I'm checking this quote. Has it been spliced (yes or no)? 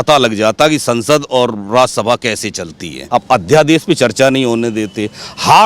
yes